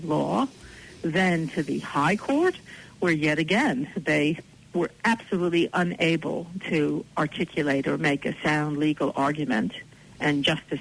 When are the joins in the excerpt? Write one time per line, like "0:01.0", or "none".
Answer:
0:04.4